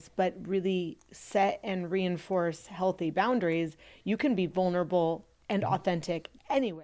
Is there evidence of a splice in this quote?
no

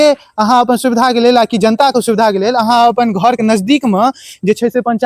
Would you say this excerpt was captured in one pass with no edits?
yes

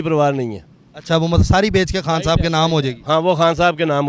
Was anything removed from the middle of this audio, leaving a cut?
no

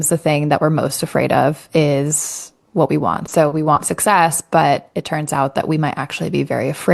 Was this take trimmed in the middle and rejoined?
no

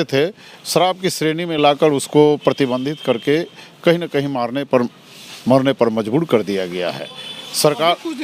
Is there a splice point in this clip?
no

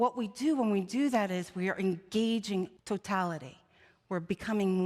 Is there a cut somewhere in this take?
yes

